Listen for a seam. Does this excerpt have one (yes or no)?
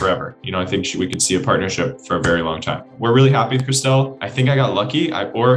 yes